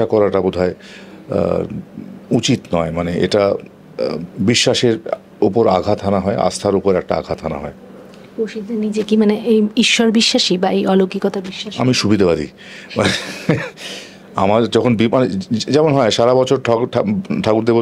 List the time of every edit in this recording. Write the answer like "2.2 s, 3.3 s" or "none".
none